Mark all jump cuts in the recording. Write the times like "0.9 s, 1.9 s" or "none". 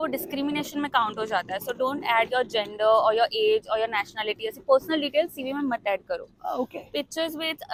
none